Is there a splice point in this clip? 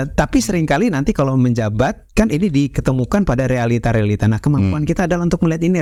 no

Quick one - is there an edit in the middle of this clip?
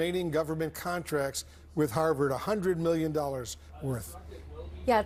no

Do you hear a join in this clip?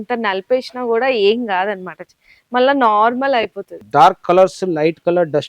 yes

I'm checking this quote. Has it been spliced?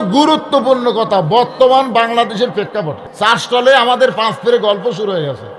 yes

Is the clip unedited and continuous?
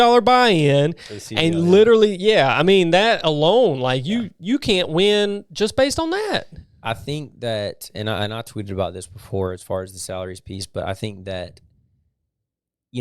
yes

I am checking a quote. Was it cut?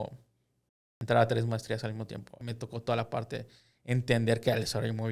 yes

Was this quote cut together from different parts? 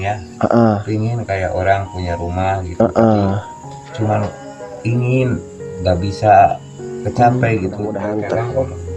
yes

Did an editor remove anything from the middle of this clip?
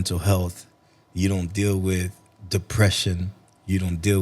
no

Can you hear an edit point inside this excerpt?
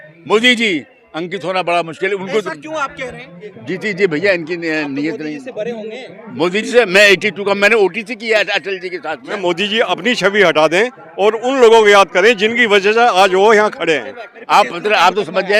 yes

